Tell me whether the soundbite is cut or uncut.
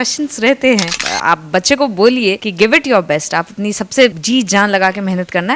cut